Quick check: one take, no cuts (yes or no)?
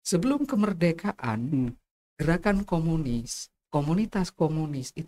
yes